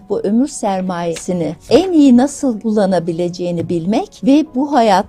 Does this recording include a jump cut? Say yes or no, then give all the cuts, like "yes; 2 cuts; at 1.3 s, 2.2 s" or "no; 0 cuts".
yes; 3 cuts; at 1.2 s, 2.6 s, 4.1 s